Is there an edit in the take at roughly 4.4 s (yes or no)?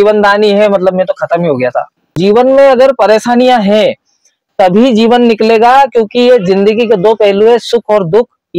no